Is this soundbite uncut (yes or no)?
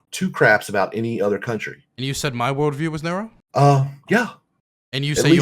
no